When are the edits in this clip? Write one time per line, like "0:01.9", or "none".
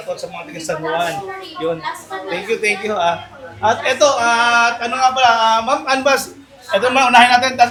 none

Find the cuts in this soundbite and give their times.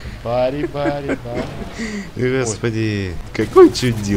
0:03.2

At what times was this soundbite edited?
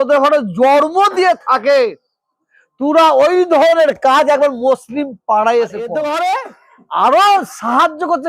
0:06.0

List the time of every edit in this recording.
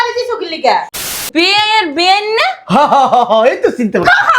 0:01.0

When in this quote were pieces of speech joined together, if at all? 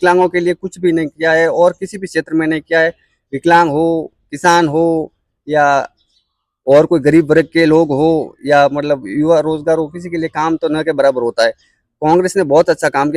none

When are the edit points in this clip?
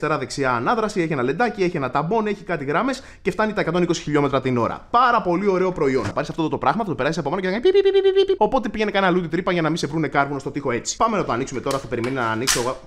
0:06.1
0:08.4
0:10.9

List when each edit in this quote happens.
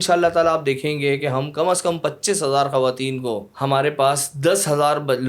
0:03.5

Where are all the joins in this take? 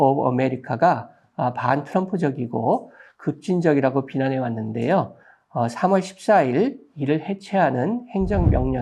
none

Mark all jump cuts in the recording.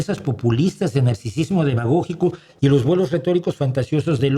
none

